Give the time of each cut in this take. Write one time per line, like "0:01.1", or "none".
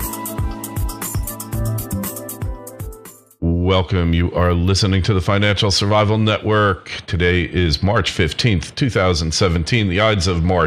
0:03.2